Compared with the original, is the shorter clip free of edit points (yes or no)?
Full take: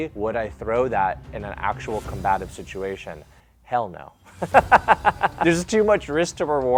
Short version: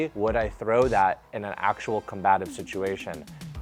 yes